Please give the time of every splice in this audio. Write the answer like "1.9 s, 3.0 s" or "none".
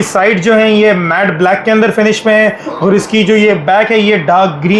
none